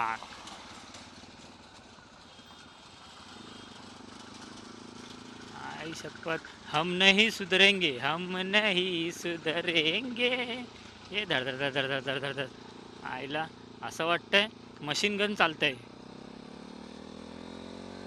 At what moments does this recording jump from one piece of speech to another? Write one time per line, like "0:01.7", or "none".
none